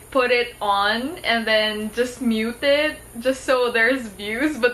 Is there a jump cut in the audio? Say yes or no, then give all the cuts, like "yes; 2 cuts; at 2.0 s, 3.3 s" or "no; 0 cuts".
no; 0 cuts